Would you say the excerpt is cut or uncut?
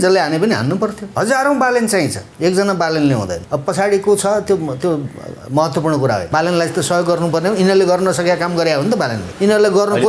cut